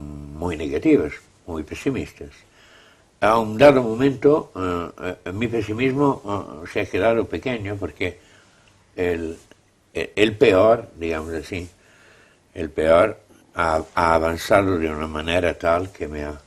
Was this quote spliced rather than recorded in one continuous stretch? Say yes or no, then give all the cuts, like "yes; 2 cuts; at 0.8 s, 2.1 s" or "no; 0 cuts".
yes; 1 cut; at 7.5 s